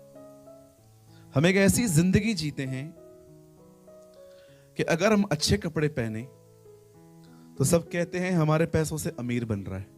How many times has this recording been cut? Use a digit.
3